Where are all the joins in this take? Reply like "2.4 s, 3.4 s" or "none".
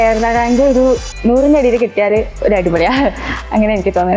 1.1 s